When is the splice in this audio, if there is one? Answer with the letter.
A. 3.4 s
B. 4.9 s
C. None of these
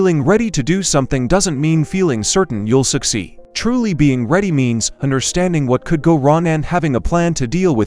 A